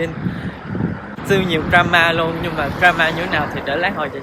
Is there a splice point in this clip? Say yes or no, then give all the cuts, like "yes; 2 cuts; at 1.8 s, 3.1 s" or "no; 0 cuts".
yes; 1 cut; at 1.1 s